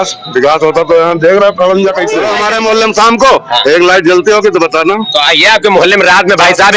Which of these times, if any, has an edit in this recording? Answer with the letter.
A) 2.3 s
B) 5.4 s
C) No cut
A